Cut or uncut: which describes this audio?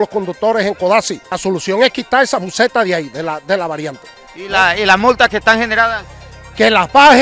cut